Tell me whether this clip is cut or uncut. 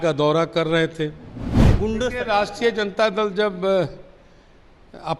cut